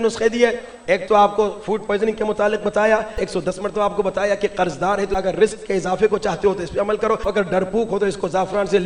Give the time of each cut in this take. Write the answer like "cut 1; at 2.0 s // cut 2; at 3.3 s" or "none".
cut 1; at 3.2 s // cut 2; at 5.1 s // cut 3; at 7.3 s